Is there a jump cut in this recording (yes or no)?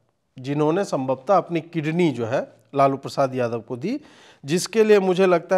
no